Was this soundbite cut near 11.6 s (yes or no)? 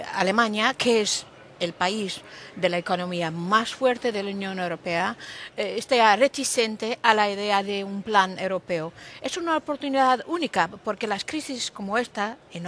yes